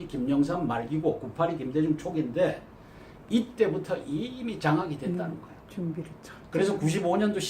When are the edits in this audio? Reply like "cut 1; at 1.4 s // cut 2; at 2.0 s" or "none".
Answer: cut 1; at 1.5 s